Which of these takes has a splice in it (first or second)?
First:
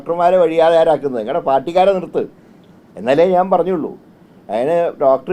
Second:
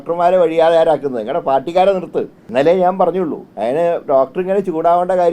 second